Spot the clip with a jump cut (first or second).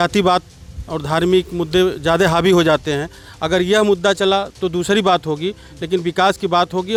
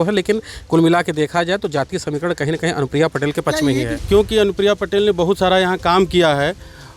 second